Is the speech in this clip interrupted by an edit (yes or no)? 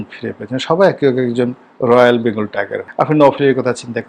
yes